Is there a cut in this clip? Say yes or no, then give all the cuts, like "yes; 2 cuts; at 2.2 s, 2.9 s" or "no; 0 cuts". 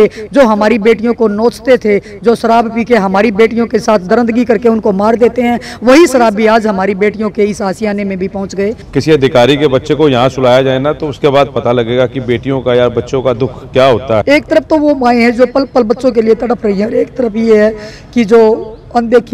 yes; 2 cuts; at 8.8 s, 14.2 s